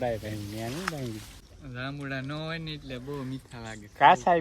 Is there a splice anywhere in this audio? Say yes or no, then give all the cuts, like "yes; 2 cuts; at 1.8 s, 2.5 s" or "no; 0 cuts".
yes; 1 cut; at 1.3 s